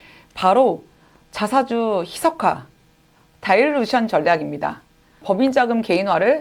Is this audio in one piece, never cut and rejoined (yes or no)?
no